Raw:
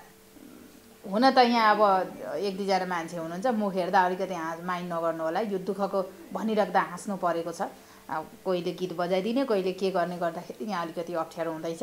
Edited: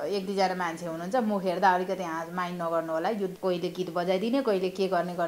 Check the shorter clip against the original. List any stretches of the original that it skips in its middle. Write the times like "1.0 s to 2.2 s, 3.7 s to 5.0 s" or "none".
5.6 s to 8.3 s